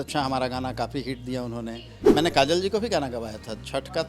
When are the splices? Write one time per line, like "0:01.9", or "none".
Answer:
0:01.9